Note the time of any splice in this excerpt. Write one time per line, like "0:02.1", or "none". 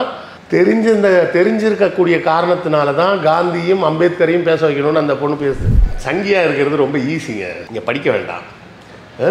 0:05.7